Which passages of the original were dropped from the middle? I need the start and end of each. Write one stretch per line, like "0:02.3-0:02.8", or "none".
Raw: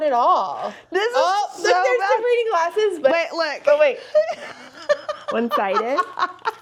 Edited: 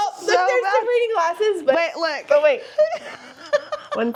none